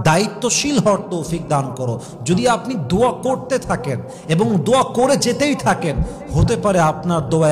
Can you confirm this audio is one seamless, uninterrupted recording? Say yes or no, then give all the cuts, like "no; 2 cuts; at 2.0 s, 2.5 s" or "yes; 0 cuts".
yes; 0 cuts